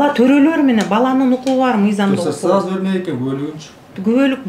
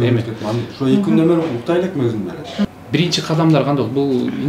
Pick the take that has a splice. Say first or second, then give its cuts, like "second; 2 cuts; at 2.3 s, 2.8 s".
second; 1 cut; at 2.7 s